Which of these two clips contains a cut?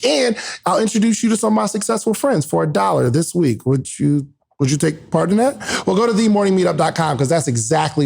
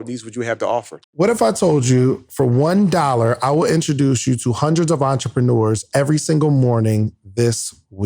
second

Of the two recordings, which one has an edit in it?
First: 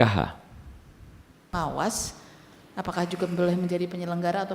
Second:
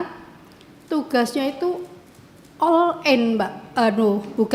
first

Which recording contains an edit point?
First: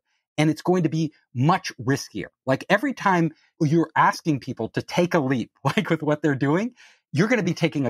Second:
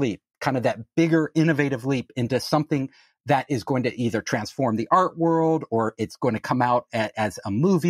first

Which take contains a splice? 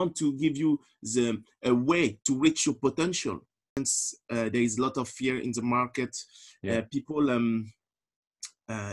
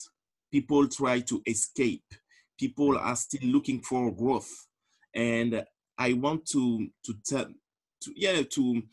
first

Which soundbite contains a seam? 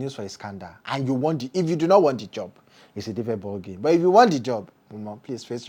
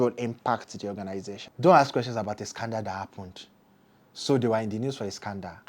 second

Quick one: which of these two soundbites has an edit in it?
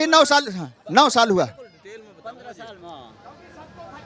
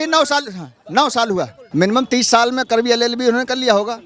second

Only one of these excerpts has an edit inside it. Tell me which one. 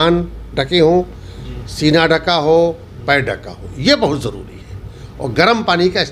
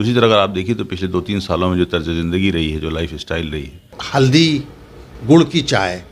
second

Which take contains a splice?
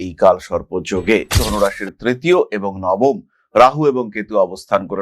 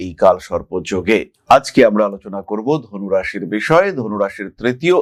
first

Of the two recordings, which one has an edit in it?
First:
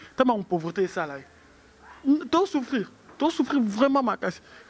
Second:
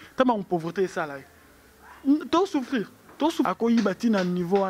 second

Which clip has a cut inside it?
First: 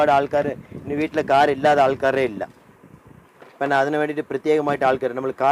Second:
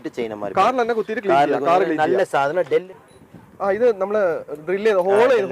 second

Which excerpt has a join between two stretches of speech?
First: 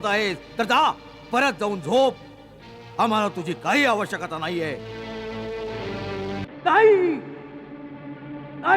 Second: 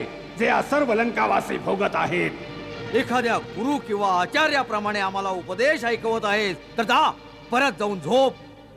first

